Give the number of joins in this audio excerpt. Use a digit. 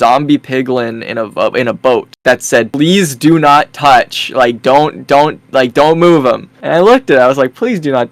0